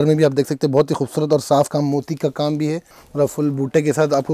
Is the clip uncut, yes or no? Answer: no